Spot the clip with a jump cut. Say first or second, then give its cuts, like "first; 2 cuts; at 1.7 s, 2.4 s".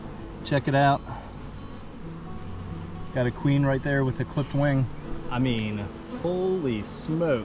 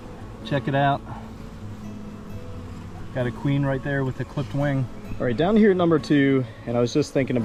first; 1 cut; at 5.2 s